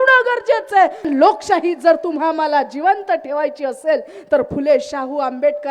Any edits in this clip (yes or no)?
yes